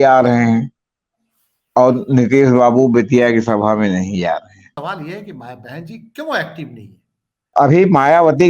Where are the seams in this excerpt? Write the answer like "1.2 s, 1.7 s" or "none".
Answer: 4.7 s, 7.5 s